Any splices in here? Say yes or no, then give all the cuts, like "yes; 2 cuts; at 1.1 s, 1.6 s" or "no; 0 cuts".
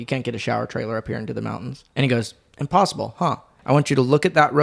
yes; 2 cuts; at 1.8 s, 3.5 s